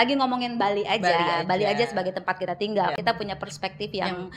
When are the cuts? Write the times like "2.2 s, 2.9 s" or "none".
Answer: 2.9 s